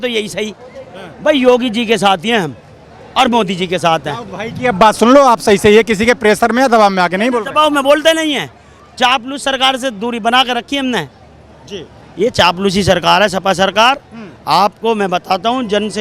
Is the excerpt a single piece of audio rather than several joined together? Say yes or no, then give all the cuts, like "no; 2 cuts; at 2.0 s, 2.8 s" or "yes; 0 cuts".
yes; 0 cuts